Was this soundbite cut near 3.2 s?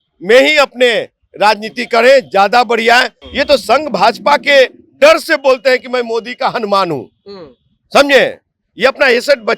yes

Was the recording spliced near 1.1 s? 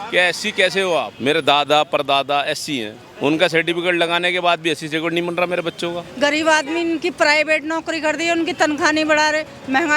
yes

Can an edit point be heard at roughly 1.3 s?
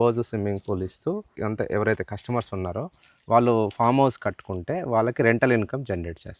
yes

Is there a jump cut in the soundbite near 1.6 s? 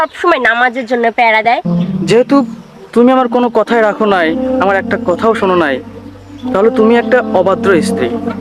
yes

